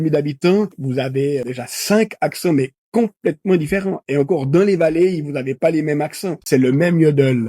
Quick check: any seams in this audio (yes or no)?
yes